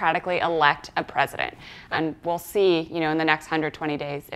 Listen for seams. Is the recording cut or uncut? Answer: cut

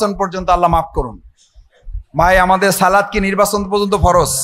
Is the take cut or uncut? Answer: uncut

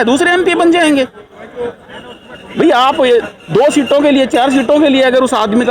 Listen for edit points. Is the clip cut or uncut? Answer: uncut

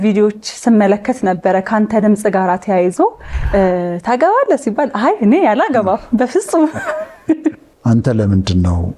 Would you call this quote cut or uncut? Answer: cut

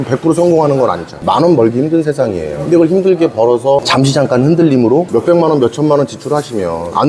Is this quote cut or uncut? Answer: cut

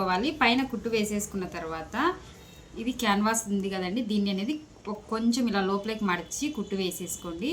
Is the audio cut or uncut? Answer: uncut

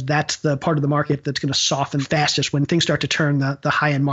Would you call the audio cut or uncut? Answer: cut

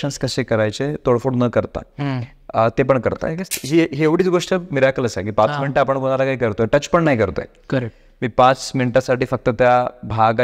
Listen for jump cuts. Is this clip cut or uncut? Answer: cut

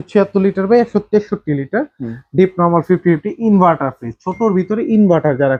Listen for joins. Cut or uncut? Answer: uncut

